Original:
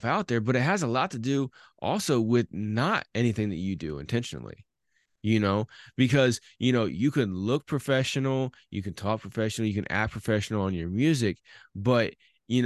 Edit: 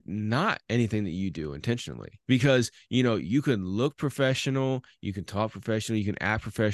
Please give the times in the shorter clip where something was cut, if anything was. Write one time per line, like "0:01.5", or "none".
0:02.1